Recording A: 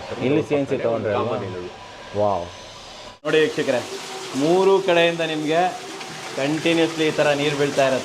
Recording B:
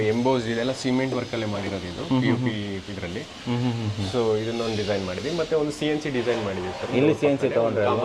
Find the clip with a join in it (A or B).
A